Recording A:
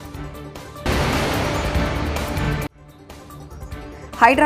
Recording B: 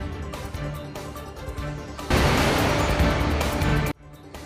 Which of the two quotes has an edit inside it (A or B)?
A